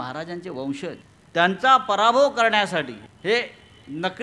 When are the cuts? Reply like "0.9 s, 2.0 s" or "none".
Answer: 1.1 s, 3.0 s